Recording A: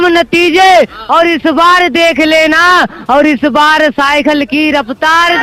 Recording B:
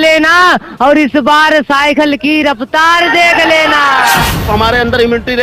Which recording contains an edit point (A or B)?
B